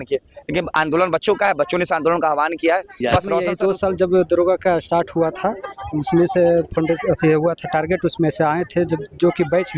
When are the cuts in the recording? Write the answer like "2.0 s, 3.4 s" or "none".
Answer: 3.5 s